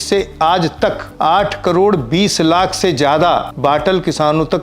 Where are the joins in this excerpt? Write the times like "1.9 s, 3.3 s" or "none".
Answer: 1.1 s, 3.5 s